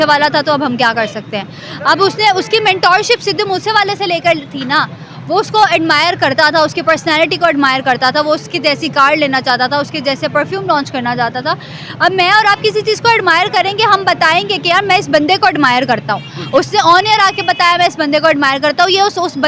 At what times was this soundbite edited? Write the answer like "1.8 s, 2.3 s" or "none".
none